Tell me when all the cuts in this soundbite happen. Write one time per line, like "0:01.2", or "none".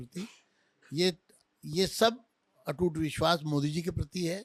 none

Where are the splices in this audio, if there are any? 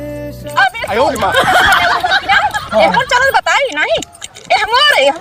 none

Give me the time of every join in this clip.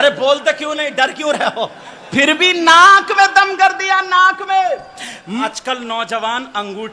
0:05.4

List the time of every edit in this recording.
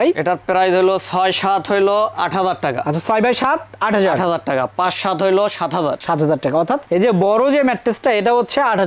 none

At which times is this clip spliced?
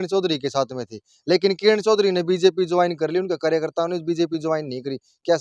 none

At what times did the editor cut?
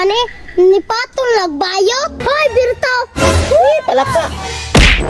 0:02.2

